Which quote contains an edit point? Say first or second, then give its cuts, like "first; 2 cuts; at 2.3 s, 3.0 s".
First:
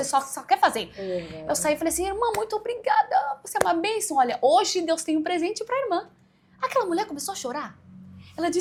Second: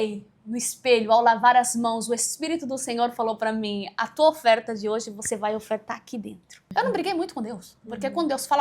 second; 1 cut; at 6.5 s